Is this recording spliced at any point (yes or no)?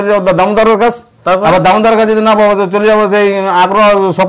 yes